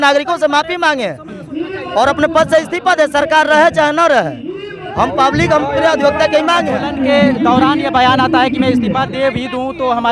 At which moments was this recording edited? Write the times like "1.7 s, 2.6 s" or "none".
6.8 s